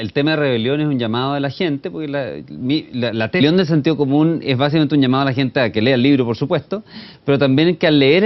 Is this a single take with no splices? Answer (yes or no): yes